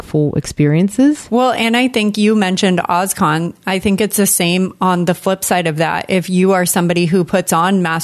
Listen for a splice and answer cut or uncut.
cut